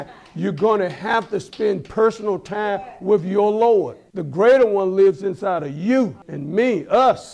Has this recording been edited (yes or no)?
yes